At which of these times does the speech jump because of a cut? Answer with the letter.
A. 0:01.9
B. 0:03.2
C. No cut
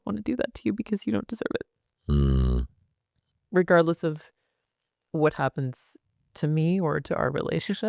B